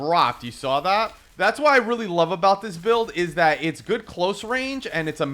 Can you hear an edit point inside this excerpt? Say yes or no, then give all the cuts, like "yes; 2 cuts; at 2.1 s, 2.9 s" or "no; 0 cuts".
yes; 1 cut; at 1.2 s